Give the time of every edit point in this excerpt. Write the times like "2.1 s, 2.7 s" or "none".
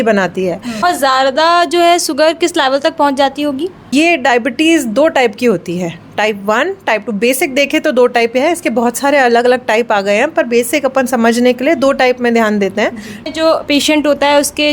0.8 s, 3.9 s, 13.3 s

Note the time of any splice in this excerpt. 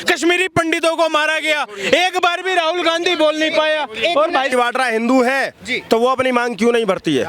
4.5 s

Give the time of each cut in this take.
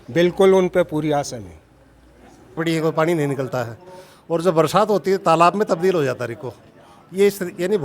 2.6 s

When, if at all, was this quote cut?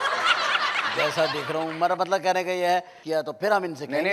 3.0 s

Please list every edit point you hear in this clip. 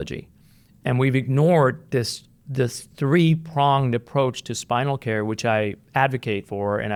none

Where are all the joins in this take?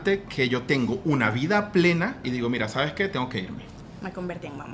2.2 s

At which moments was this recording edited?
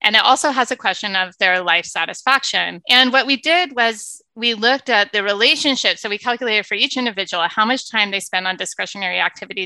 2.8 s

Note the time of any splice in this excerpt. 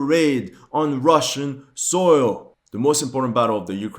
2.4 s

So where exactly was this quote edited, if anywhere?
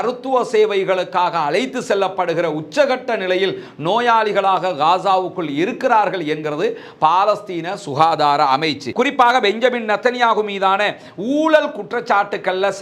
8.8 s

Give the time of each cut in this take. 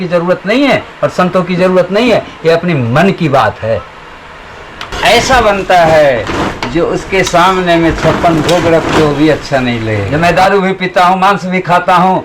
4.9 s, 10.0 s

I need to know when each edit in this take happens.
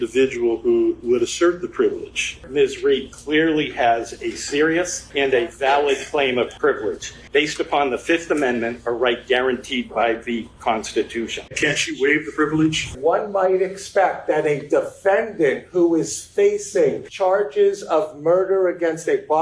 1.0 s, 2.5 s, 5.0 s, 6.9 s, 11.4 s, 12.9 s, 17.1 s

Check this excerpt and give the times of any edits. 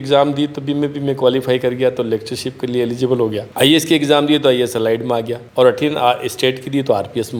none

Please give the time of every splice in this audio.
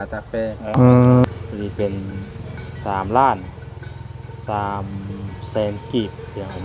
1.2 s

